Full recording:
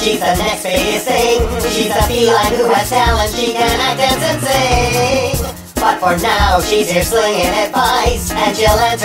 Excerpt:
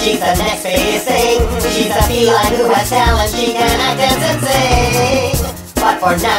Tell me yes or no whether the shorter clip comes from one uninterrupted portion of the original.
yes